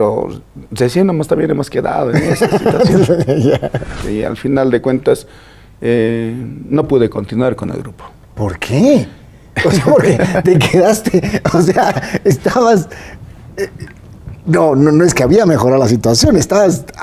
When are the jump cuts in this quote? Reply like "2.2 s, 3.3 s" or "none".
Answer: 4.0 s